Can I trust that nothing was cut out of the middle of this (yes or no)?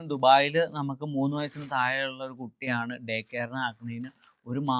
yes